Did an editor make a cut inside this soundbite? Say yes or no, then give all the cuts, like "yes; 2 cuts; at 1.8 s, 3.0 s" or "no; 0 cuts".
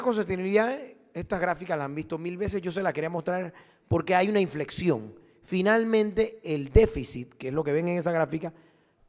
no; 0 cuts